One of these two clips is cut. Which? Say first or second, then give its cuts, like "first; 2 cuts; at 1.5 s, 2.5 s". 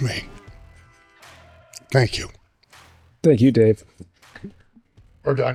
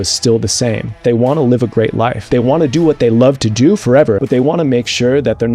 second; 3 cuts; at 1.0 s, 2.2 s, 4.2 s